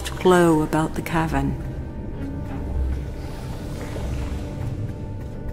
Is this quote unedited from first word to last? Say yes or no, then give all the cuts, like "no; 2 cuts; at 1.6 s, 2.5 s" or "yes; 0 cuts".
yes; 0 cuts